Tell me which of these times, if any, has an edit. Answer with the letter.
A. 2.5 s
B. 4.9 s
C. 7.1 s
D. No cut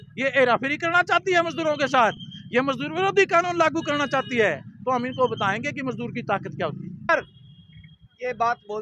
C